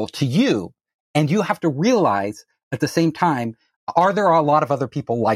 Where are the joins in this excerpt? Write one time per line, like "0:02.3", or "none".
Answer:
none